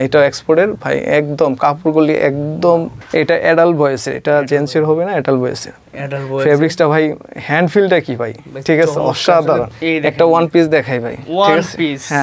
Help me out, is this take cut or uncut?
cut